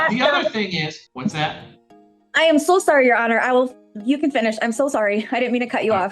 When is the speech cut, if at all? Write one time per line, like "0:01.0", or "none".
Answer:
0:01.0